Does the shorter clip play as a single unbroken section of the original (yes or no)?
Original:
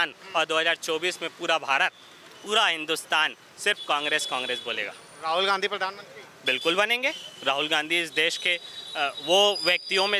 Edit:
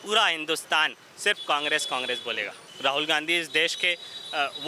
no